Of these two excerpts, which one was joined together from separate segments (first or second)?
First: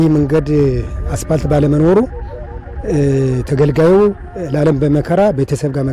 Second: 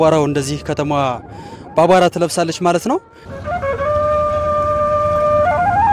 second